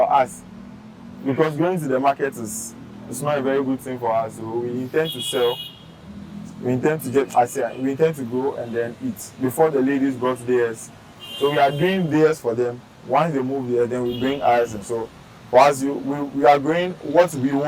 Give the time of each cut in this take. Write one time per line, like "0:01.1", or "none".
none